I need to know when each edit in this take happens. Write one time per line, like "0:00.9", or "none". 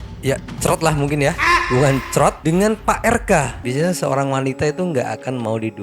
0:03.6